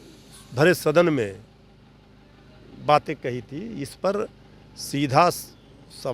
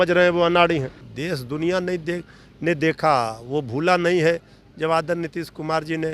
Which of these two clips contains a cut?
second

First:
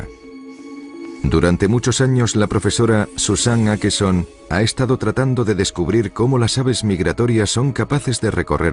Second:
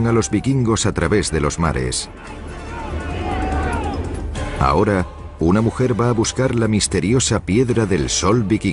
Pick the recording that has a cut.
second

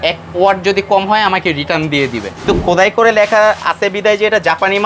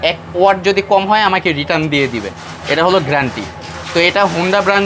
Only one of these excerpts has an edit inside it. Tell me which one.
first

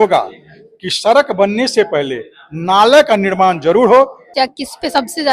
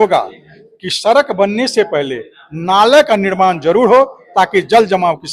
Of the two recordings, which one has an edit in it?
first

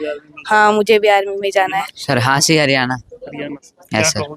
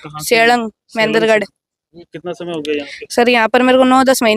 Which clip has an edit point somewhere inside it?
first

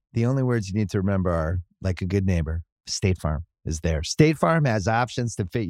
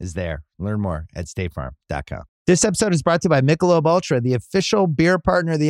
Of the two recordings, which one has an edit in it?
second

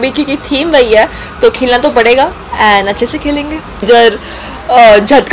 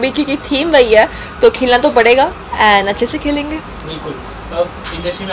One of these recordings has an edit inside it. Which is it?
first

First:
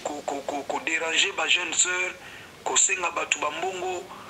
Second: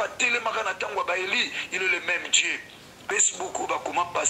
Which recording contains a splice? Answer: second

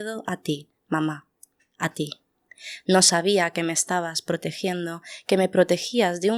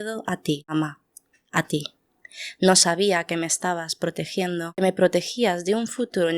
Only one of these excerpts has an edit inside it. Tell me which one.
second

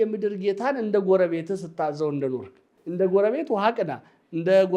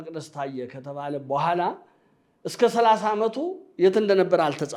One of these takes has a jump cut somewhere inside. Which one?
first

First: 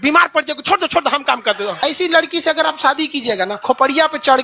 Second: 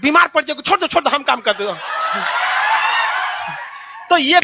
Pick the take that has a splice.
first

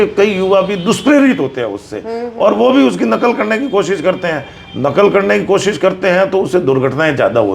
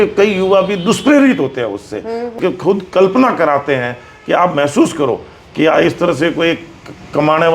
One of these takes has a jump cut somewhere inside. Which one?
second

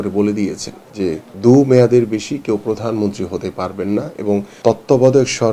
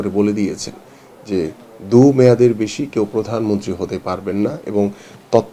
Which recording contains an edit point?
first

